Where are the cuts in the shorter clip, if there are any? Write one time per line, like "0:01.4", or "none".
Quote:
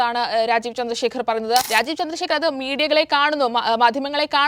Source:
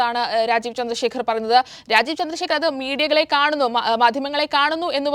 0:01.7